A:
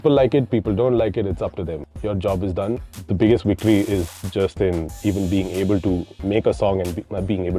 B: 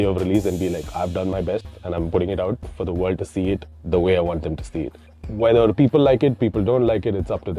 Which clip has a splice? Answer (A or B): A